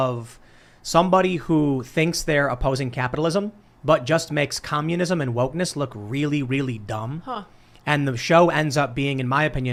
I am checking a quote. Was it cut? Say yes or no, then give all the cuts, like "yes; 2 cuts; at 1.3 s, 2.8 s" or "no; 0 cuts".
no; 0 cuts